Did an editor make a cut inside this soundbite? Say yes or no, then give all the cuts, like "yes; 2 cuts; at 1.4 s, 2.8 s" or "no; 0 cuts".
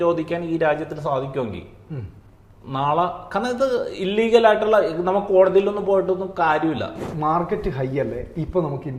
yes; 1 cut; at 7.0 s